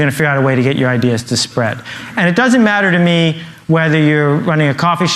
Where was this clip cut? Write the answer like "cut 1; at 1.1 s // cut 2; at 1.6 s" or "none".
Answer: none